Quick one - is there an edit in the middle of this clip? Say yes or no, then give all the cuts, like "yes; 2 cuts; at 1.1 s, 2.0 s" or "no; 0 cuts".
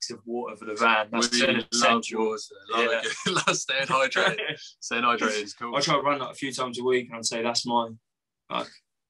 yes; 1 cut; at 5.6 s